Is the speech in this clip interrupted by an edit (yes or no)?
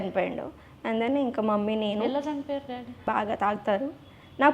yes